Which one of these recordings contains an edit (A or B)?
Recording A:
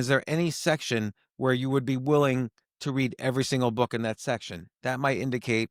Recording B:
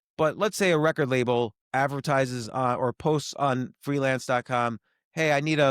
B